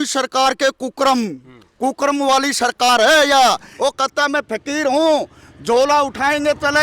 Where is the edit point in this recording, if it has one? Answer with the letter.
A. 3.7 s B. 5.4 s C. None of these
A